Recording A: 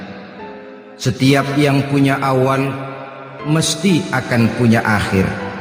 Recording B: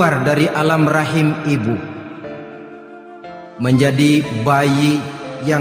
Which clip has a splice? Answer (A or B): B